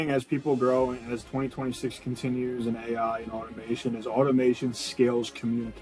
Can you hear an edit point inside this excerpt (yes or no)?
no